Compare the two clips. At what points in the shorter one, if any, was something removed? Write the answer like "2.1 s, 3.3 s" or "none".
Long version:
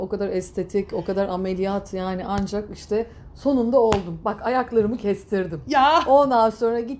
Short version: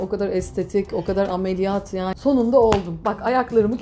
2.1 s